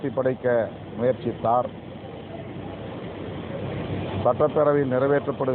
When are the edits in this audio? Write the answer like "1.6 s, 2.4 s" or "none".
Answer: none

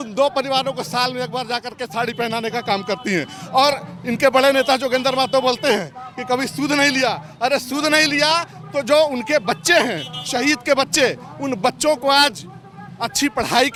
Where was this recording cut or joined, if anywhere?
none

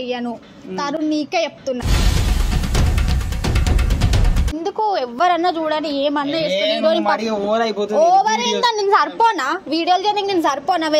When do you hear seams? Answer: 4.6 s

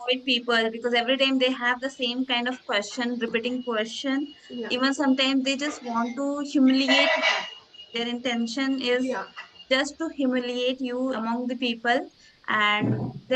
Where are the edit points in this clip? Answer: 11.2 s

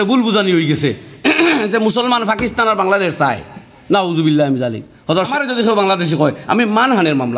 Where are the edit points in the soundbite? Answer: 5.3 s

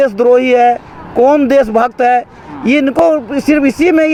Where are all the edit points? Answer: none

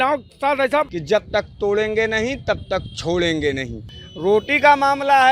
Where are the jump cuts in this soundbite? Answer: 1.0 s, 4.0 s

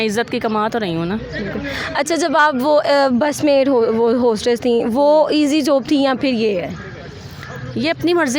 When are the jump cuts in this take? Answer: none

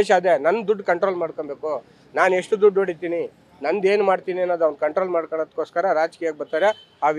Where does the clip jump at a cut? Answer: none

